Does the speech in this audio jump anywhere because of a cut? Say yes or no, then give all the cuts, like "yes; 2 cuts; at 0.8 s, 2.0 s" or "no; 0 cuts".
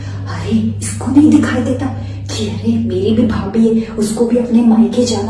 no; 0 cuts